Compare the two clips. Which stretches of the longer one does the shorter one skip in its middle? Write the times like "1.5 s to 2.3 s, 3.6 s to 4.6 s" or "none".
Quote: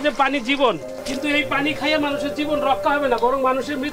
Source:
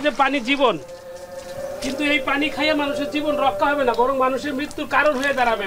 1.0 s to 1.7 s